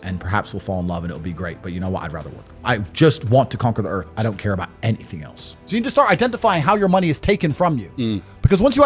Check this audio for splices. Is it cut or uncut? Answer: cut